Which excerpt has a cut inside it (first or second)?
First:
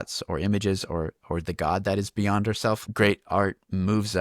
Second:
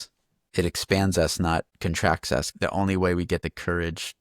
second